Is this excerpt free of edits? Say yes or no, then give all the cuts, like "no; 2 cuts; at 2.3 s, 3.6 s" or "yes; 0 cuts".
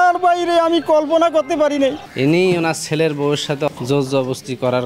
no; 1 cut; at 2.1 s